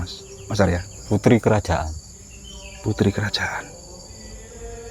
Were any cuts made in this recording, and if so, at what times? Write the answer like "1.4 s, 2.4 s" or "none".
0.9 s

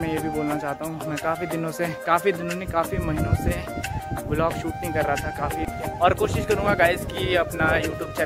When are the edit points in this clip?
5.7 s

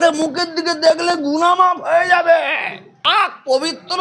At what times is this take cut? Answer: 3.0 s

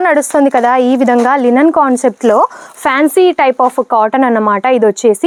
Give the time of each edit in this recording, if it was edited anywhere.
none

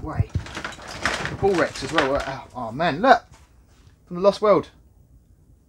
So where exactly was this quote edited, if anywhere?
none

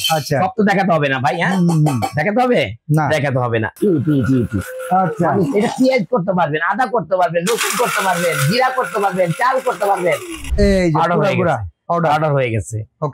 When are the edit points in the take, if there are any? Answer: 3.7 s, 10.5 s

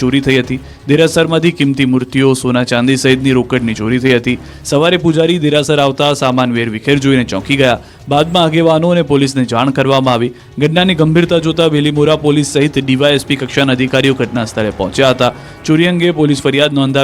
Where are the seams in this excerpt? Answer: 15.9 s

